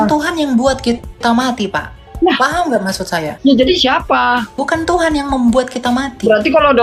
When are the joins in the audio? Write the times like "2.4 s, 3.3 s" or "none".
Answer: 3.3 s, 4.6 s